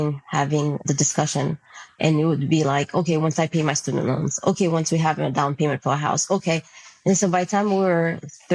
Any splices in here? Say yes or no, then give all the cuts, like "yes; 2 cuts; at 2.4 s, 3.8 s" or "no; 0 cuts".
no; 0 cuts